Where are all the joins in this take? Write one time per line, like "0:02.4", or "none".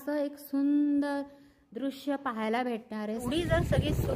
0:03.2